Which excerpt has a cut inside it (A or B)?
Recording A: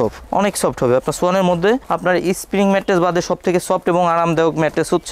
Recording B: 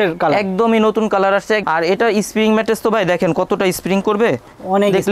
B